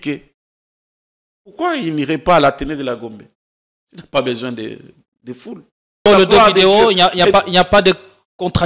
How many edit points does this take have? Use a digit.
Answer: 1